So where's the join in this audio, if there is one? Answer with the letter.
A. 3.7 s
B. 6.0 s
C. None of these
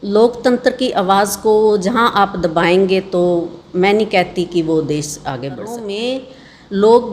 B